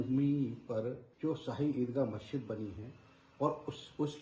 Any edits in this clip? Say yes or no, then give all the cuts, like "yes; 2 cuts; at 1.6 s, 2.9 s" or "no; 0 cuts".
yes; 1 cut; at 1.1 s